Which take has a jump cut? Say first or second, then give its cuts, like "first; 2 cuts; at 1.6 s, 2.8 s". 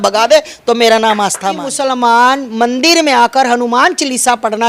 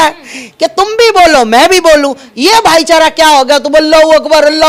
first; 1 cut; at 1.7 s